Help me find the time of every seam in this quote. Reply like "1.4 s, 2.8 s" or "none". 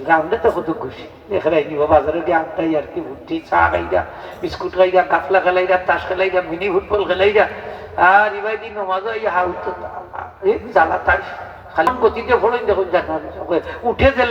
11.9 s